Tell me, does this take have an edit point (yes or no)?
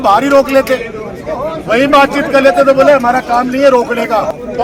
no